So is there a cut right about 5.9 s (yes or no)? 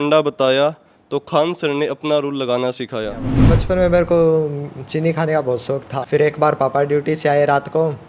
yes